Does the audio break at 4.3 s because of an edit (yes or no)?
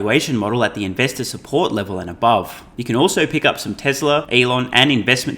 yes